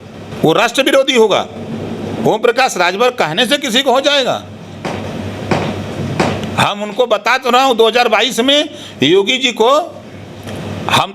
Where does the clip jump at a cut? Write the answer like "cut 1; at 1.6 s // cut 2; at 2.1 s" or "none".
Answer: none